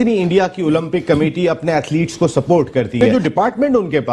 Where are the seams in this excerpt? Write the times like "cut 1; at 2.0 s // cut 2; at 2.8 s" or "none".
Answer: none